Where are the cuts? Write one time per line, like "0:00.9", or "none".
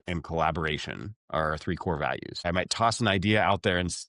0:02.4